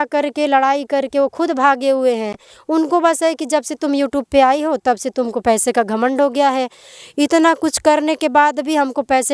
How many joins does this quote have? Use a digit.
0